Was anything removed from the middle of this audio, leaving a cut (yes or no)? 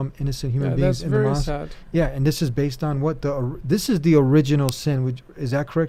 no